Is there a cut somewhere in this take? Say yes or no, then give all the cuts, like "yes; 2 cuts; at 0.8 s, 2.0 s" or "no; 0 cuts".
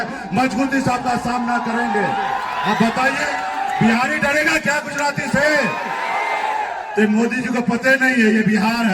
no; 0 cuts